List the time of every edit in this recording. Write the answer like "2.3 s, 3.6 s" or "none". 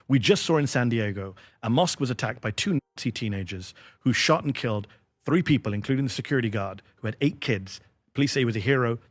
none